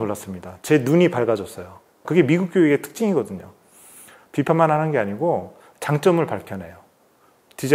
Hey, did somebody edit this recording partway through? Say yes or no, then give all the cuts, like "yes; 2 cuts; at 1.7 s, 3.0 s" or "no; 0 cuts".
yes; 1 cut; at 2.0 s